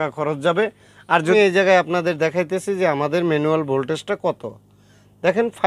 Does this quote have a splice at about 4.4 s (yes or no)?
no